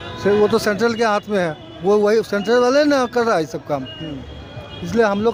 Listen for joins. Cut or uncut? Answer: uncut